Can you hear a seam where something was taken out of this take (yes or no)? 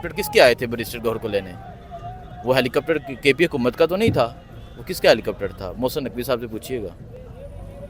no